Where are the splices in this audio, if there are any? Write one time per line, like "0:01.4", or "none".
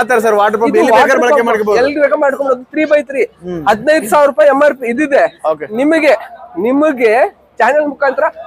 none